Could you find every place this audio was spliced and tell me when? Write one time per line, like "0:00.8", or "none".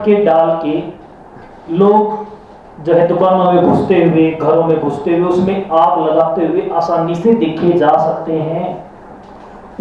none